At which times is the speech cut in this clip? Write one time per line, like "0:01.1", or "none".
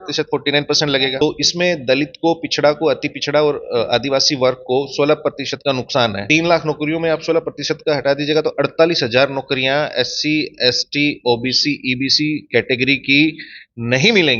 0:01.2
0:06.2